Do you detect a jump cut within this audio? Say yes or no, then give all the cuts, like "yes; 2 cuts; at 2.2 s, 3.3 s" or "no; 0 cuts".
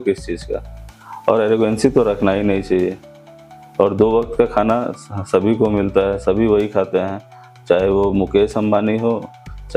no; 0 cuts